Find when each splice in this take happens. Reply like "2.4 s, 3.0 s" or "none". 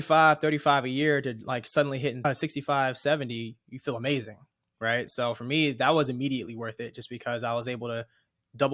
2.2 s